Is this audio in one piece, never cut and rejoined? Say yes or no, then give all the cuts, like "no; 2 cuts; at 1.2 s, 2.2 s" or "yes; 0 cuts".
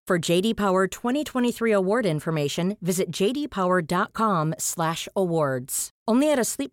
yes; 0 cuts